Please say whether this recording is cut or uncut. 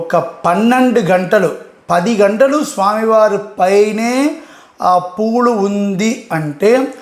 uncut